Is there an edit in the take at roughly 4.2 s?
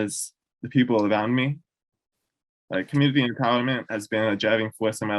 no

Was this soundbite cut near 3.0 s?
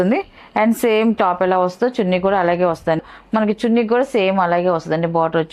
yes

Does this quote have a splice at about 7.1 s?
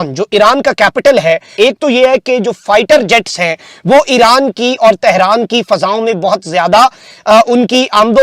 no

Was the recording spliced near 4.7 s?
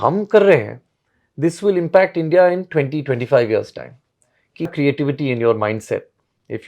yes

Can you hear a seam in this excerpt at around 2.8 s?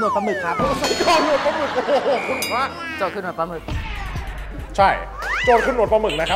yes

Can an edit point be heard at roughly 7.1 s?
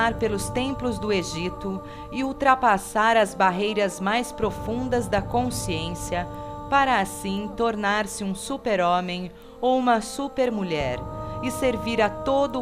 yes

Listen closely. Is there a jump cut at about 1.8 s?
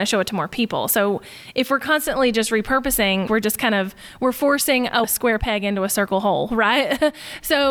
no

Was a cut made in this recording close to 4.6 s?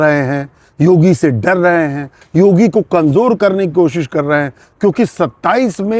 no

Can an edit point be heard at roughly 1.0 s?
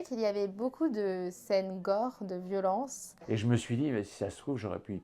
no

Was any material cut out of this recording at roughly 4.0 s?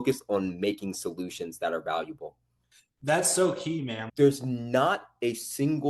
yes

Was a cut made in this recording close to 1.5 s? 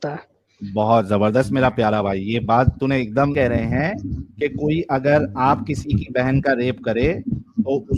no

